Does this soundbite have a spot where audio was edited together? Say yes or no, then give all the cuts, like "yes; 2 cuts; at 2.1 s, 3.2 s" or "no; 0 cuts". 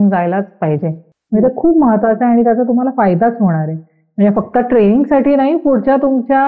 no; 0 cuts